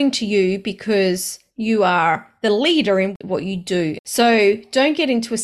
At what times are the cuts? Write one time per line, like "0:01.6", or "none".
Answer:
0:04.0